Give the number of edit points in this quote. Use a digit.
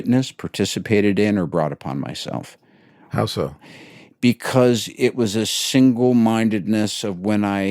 0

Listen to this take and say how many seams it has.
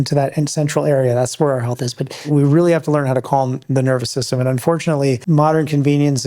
2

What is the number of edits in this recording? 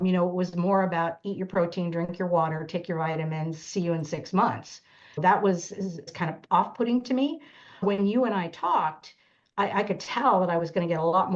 3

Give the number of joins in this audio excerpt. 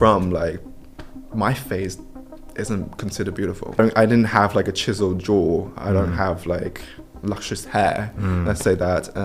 1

